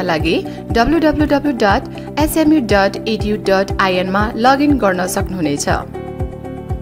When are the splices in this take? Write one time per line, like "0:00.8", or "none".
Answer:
none